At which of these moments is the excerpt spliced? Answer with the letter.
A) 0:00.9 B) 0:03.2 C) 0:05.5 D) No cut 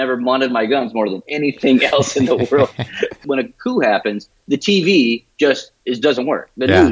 B